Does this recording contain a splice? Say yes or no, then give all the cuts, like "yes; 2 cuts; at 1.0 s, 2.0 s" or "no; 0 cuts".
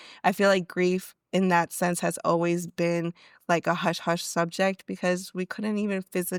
no; 0 cuts